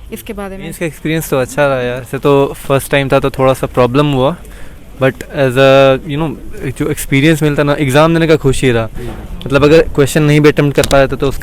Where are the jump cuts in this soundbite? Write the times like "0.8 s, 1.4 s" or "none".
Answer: 0.8 s, 2.1 s

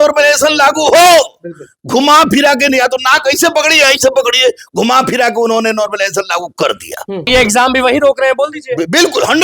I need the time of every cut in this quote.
7.2 s

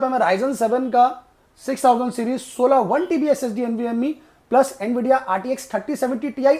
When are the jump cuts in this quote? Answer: none

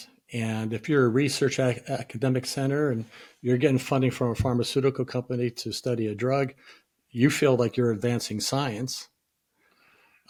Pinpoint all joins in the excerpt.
none

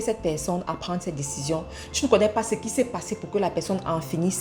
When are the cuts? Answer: none

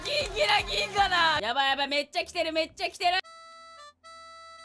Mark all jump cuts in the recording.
1.4 s, 3.4 s

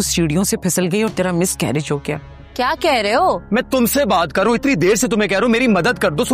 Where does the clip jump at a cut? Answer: 2.4 s

